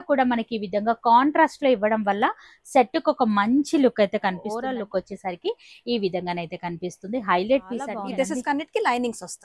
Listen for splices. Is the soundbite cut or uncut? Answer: cut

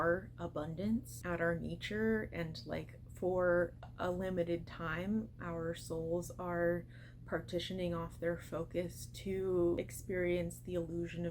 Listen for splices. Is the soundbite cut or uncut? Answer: cut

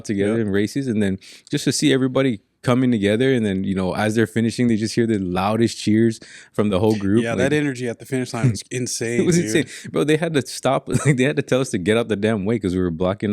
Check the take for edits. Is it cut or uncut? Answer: uncut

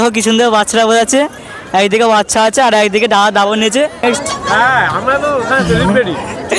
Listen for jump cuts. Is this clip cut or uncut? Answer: cut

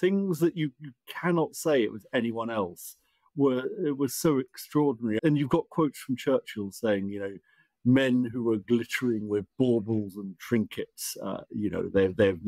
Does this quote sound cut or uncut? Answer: cut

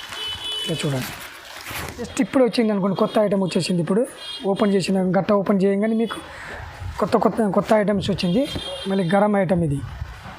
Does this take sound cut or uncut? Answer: cut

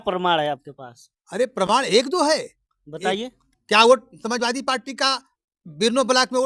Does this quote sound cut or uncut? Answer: uncut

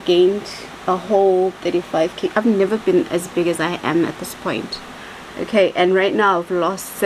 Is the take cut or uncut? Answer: uncut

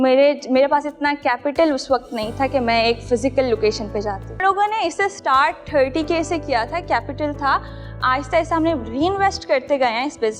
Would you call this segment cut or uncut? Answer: cut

